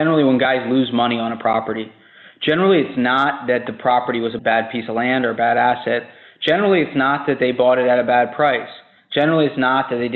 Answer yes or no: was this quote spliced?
no